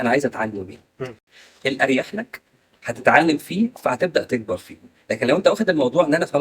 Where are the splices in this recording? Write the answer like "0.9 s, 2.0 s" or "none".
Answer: 1.2 s